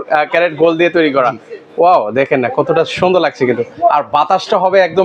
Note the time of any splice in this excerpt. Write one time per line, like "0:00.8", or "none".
none

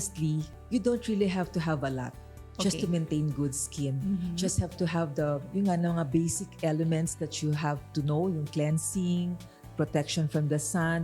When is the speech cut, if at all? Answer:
none

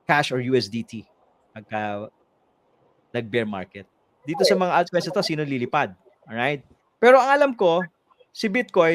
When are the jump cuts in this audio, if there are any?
0:04.2

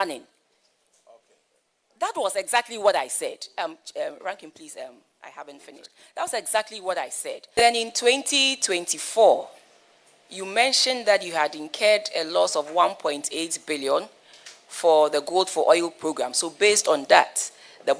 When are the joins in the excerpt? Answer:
0:07.6

